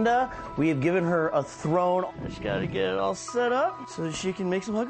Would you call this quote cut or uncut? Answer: cut